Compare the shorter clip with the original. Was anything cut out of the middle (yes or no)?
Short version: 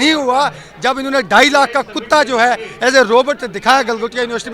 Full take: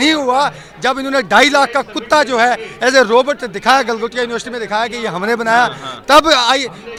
no